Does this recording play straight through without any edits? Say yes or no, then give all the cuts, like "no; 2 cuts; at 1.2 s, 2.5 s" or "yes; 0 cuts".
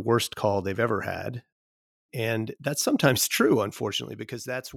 yes; 0 cuts